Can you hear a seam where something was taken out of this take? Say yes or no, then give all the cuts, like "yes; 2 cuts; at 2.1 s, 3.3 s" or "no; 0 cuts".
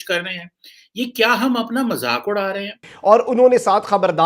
yes; 1 cut; at 2.9 s